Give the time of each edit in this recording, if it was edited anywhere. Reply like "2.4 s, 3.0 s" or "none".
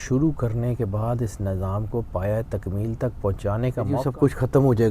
4.0 s